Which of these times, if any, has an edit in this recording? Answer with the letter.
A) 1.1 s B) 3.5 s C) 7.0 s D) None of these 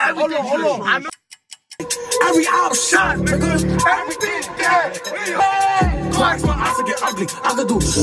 A